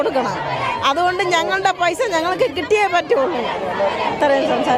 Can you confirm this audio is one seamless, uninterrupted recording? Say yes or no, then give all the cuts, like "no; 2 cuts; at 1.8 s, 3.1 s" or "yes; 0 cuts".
yes; 0 cuts